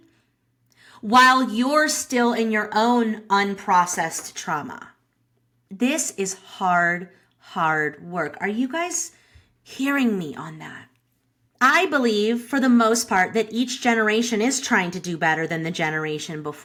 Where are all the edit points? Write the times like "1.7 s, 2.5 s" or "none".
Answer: none